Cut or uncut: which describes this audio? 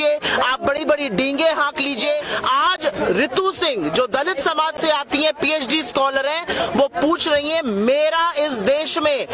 cut